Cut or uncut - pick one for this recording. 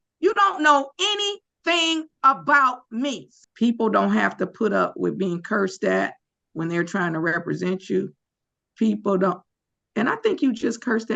cut